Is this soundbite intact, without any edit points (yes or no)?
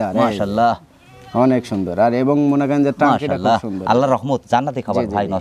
yes